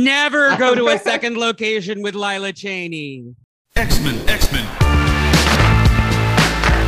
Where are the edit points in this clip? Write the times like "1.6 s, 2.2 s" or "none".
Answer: 3.5 s